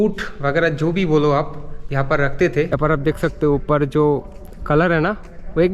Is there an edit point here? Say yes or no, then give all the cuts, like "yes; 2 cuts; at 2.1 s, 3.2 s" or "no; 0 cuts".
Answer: yes; 1 cut; at 2.7 s